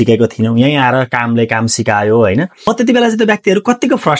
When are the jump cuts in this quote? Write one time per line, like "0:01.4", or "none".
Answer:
0:02.7